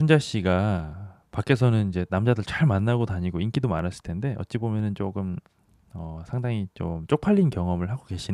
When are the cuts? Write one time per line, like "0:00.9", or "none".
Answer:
none